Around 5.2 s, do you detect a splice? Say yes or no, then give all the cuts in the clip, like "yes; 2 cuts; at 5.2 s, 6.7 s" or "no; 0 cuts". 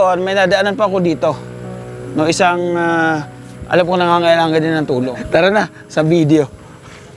yes; 1 cut; at 5.2 s